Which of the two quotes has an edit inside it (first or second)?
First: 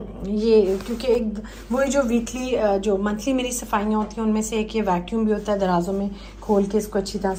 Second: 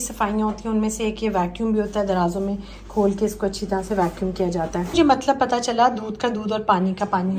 second